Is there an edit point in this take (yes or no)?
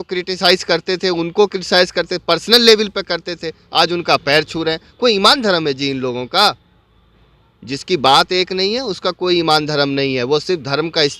no